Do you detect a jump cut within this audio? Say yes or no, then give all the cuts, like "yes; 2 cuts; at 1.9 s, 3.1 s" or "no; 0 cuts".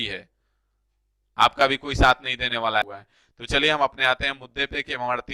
yes; 1 cut; at 3.0 s